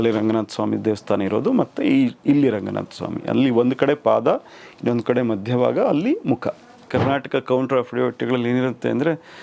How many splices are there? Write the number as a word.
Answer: one